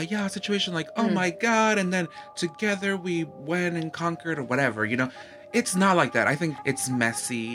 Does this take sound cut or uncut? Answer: cut